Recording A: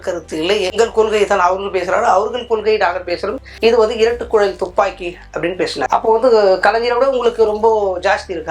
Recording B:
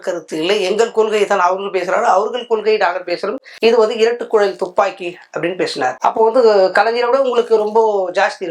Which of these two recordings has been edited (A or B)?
A